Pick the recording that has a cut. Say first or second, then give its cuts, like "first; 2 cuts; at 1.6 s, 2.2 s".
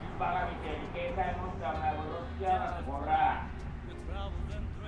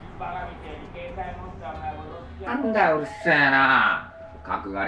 first; 1 cut; at 2.5 s